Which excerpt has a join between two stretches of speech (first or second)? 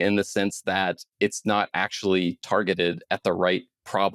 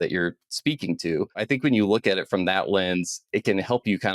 second